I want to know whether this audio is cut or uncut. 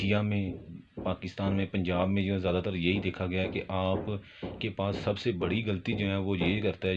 uncut